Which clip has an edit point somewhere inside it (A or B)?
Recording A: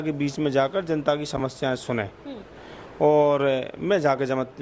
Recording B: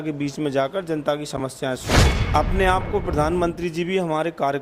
B